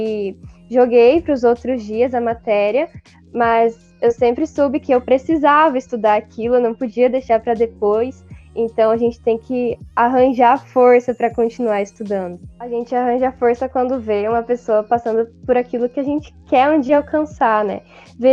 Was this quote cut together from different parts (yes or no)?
yes